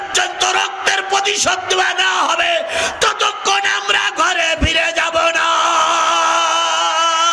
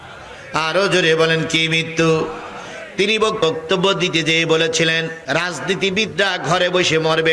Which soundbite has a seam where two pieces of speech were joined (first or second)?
second